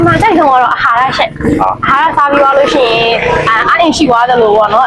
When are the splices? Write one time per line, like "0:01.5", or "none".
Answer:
none